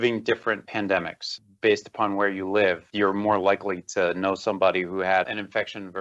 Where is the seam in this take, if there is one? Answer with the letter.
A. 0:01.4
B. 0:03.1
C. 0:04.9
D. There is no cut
A